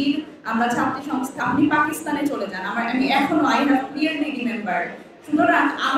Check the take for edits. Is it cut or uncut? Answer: cut